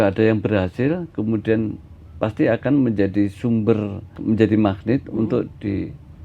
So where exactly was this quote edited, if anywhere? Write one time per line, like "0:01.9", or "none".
0:04.1